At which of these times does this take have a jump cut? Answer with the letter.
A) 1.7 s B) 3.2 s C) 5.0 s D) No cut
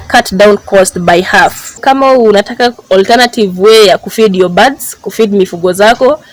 A